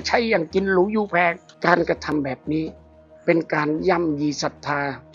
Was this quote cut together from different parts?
yes; 1 cut; at 1.5 s

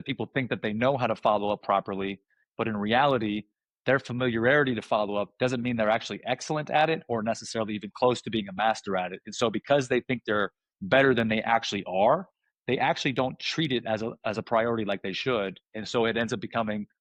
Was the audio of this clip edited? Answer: no; 0 cuts

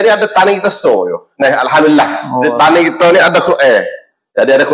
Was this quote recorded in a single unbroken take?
yes; 0 cuts

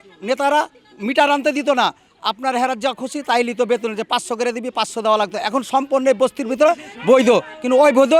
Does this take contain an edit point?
no; 0 cuts

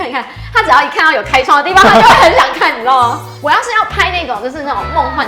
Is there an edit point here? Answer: yes; 1 cut; at 3.3 s

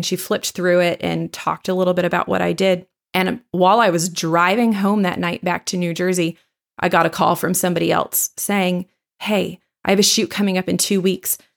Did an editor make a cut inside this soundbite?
no; 0 cuts

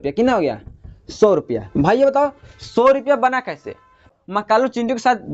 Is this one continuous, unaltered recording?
no; 1 cut; at 4.1 s

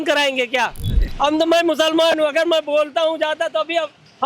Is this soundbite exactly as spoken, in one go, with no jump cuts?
no; 1 cut; at 1.0 s

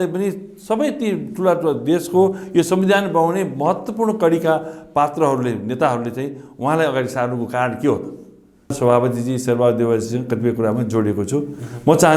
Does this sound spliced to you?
yes; 1 cut; at 8.7 s

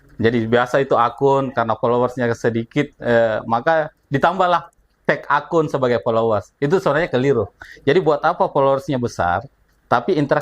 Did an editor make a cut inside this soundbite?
no; 0 cuts

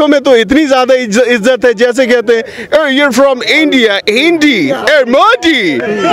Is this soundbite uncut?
yes; 0 cuts

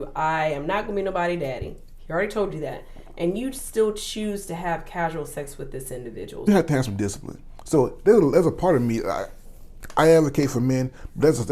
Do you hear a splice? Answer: yes; 1 cut; at 6.5 s

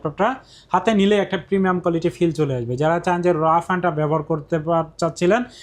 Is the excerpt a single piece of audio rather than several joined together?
yes; 0 cuts

